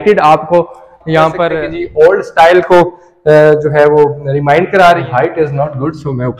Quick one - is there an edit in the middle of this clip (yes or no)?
yes